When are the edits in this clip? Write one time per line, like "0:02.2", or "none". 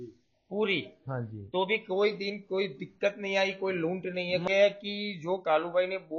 0:04.5